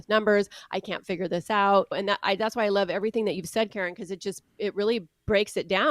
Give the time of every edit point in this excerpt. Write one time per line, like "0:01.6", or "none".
0:02.0